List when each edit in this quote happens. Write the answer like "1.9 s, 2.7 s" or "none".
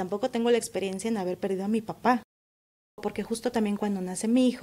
3.0 s